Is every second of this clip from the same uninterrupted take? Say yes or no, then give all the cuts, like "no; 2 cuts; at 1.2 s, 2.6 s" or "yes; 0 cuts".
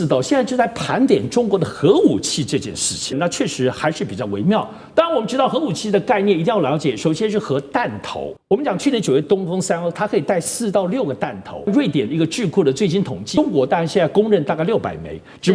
no; 5 cuts; at 3.2 s, 8.3 s, 9.2 s, 11.7 s, 13.4 s